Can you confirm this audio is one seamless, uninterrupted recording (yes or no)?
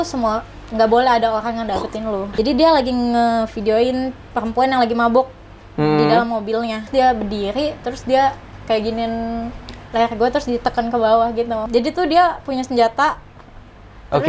no